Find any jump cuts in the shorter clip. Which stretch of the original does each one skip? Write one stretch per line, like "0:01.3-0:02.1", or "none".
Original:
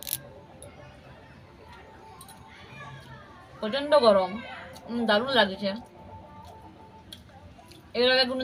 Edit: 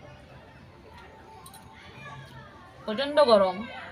none